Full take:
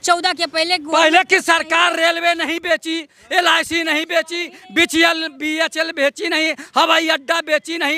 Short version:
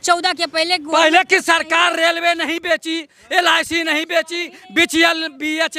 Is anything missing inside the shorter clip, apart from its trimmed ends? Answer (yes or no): no